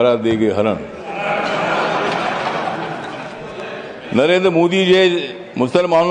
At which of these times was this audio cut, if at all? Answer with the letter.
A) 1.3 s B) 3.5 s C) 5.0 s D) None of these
B